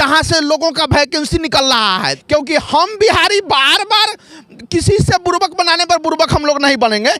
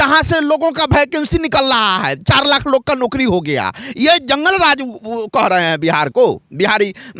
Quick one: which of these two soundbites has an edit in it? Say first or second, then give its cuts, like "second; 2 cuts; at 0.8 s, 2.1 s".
first; 1 cut; at 2.2 s